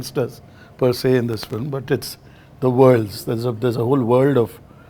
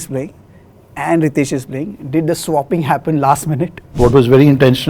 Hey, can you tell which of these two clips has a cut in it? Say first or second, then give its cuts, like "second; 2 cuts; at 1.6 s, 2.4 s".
second; 1 cut; at 3.9 s